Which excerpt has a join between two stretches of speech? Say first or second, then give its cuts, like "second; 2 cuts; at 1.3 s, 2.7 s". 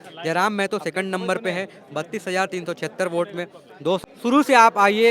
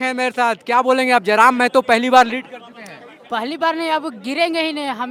first; 1 cut; at 4.0 s